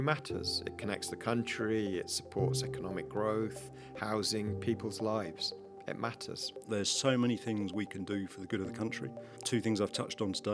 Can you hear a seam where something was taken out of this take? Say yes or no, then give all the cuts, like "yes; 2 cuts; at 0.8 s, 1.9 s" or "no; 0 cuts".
yes; 1 cut; at 6.5 s